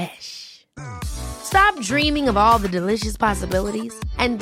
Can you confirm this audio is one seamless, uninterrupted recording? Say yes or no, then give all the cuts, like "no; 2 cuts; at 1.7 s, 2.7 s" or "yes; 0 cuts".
yes; 0 cuts